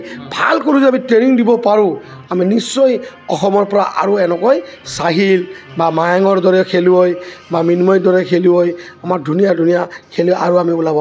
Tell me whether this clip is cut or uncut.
uncut